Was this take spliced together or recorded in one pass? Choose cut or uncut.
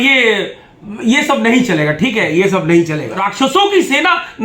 cut